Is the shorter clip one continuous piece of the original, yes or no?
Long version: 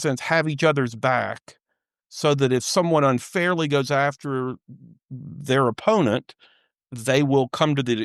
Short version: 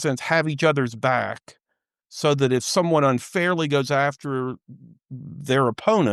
yes